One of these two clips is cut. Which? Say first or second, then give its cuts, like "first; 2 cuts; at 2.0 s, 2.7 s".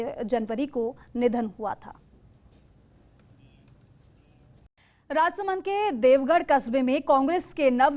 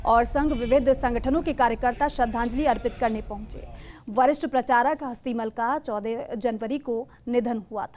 first; 1 cut; at 4.7 s